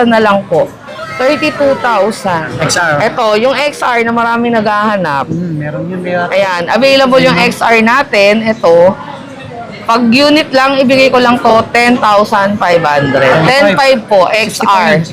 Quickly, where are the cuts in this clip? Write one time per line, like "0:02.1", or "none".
0:02.5